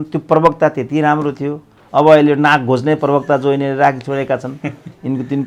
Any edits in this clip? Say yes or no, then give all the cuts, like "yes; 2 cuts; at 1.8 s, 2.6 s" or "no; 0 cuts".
no; 0 cuts